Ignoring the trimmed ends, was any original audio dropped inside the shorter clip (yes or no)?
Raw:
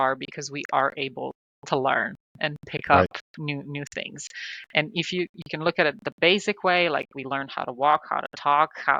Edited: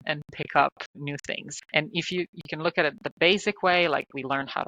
yes